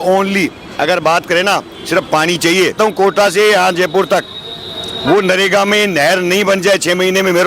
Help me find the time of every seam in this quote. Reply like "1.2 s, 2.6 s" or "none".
2.8 s